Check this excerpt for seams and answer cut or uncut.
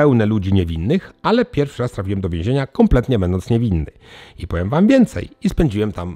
uncut